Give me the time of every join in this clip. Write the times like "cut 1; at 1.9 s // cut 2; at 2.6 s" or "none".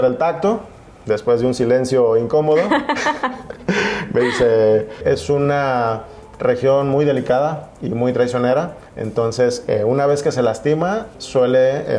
cut 1; at 5.0 s